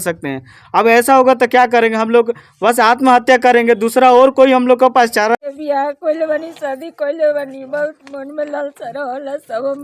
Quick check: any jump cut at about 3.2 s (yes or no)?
no